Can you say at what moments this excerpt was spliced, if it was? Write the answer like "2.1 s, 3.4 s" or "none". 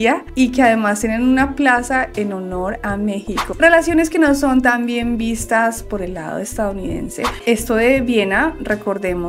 3.5 s, 7.4 s